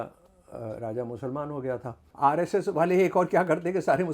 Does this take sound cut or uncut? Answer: cut